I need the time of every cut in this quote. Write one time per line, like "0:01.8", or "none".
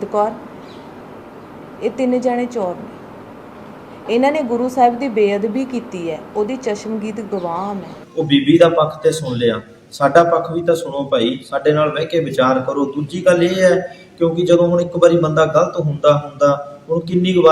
0:08.0